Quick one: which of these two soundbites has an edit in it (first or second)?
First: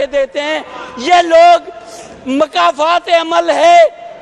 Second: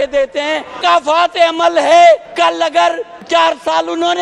second